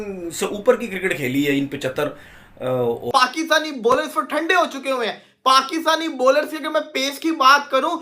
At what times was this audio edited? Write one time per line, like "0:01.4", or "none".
0:03.1